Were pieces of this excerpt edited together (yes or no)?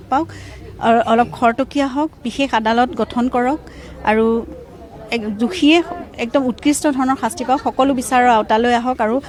no